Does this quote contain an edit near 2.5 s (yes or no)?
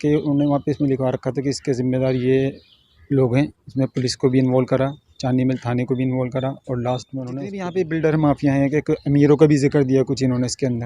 no